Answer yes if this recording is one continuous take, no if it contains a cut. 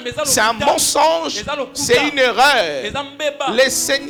yes